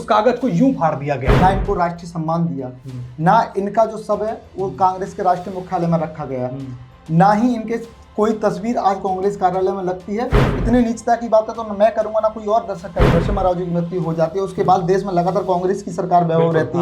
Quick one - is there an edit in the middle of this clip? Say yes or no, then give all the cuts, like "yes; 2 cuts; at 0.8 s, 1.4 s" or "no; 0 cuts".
yes; 3 cuts; at 1.3 s, 10.5 s, 13.1 s